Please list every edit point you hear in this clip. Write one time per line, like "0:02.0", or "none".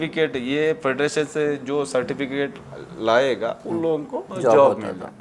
0:04.2